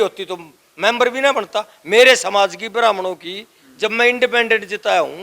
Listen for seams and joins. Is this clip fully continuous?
yes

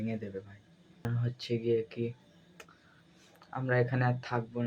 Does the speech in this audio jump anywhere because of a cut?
yes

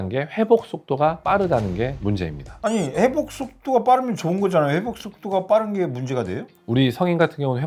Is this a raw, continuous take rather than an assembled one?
yes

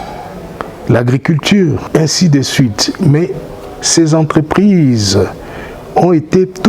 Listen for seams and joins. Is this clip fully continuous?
no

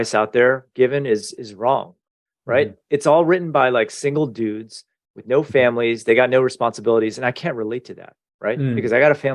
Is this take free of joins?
yes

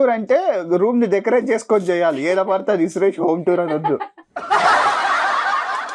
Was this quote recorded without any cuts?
yes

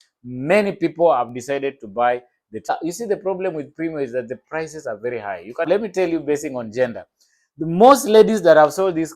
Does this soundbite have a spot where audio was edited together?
yes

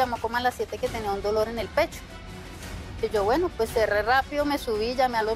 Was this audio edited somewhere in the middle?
no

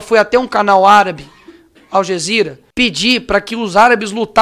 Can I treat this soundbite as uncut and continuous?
no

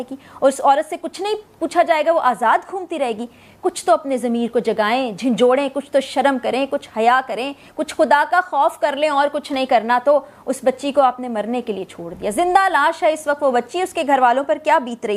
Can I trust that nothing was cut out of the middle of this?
yes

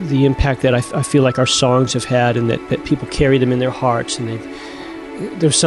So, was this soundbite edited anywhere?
no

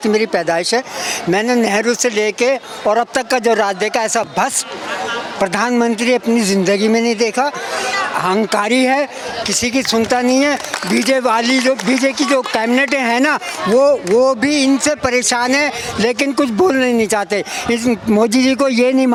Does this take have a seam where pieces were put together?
no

